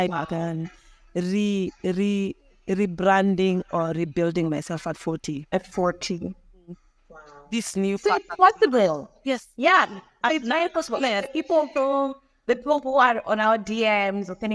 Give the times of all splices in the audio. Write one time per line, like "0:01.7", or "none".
none